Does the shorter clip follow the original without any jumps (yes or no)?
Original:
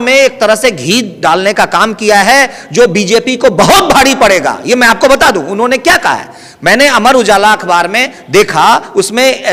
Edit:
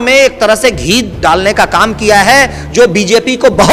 yes